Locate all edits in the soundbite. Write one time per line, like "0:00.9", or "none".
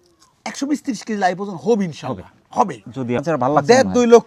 0:03.2